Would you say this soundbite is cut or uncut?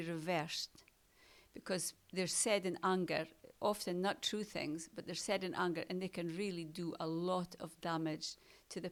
uncut